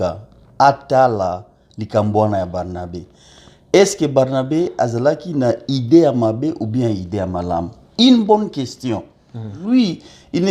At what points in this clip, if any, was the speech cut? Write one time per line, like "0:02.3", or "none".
0:09.6